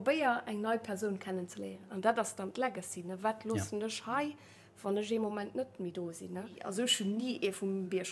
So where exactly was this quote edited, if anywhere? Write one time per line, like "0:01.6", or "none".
0:01.8
0:06.6

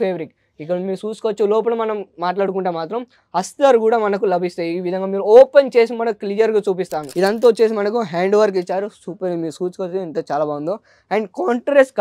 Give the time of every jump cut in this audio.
0:07.0

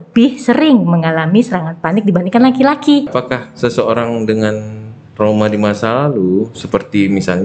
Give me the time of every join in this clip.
0:03.1

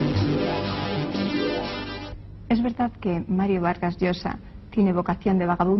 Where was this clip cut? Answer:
0:01.3

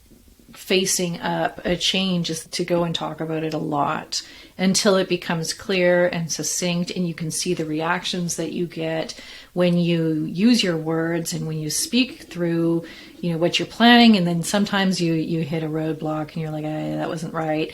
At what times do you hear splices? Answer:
0:02.5

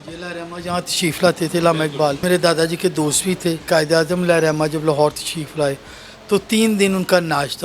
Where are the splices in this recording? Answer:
0:02.2
0:03.6

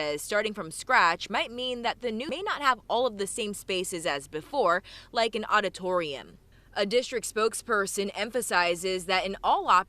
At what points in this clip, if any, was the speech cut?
0:02.2

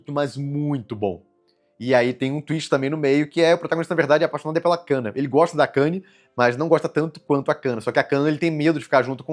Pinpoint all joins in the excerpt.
none

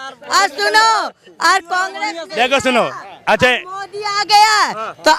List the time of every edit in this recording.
none

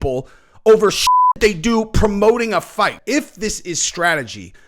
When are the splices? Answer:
0:03.0

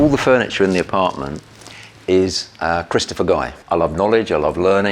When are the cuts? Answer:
0:03.6

